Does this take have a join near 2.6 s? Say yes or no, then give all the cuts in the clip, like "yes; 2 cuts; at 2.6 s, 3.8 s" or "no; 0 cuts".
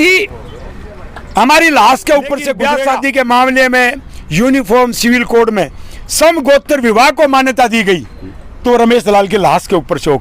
yes; 1 cut; at 2.6 s